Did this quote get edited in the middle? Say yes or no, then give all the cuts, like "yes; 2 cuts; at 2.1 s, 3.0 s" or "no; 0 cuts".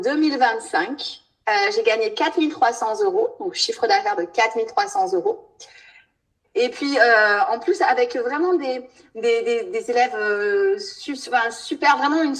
no; 0 cuts